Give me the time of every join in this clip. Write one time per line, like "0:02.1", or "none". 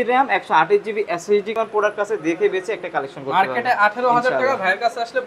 0:01.5

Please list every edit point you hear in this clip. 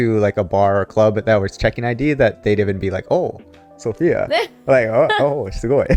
none

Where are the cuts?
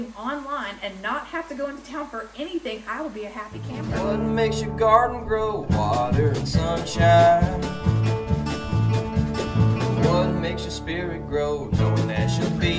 0:03.8

